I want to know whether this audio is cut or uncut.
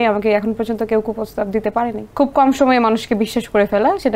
cut